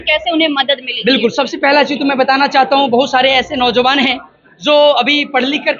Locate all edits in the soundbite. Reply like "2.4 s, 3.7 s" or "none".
none